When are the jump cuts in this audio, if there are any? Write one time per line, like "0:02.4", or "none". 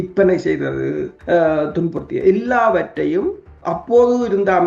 0:01.1